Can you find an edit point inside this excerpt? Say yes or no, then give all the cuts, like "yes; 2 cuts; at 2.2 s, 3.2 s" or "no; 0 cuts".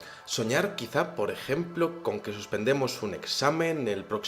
yes; 1 cut; at 2.9 s